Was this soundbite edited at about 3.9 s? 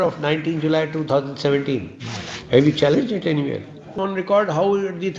yes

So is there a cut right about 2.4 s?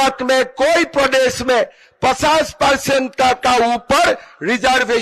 no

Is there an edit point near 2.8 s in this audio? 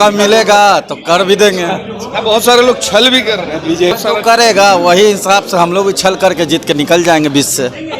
no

